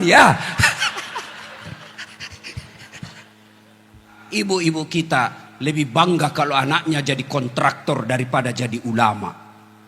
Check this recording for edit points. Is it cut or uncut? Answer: cut